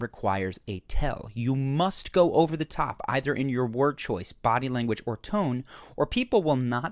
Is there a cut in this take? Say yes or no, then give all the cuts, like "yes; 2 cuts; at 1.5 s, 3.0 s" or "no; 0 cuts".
yes; 1 cut; at 1.5 s